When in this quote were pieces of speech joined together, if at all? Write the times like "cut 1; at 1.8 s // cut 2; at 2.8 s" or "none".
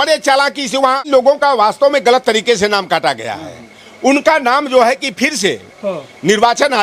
cut 1; at 1.1 s